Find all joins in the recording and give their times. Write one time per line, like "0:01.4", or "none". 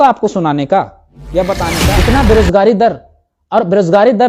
0:01.7